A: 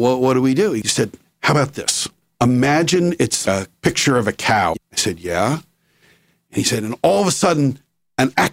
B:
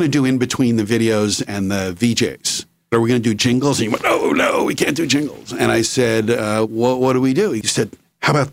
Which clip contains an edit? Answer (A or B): A